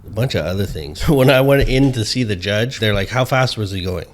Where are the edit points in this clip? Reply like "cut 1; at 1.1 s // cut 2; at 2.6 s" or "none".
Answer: cut 1; at 1.0 s // cut 2; at 2.7 s